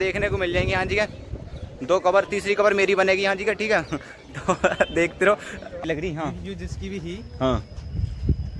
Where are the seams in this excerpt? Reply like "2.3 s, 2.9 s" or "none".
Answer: 5.8 s